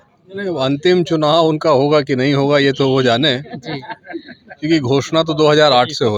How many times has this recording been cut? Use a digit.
0